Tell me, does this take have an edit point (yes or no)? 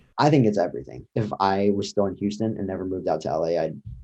yes